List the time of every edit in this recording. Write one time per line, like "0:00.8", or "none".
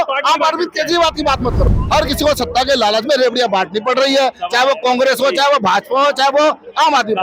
0:01.7